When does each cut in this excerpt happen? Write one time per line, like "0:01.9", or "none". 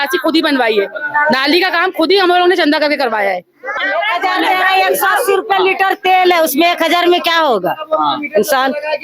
0:03.7